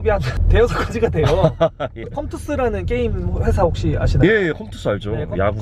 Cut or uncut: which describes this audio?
uncut